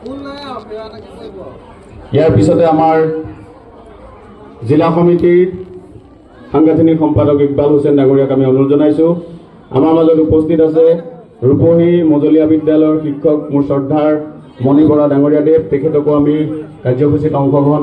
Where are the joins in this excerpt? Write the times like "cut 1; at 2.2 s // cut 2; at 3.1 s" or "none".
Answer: none